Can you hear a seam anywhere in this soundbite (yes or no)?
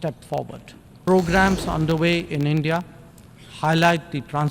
yes